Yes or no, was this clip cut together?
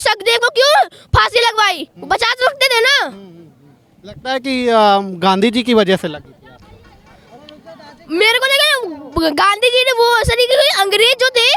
no